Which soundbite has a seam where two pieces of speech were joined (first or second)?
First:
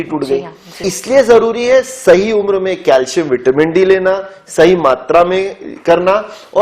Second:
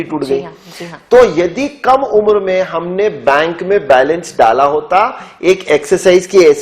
first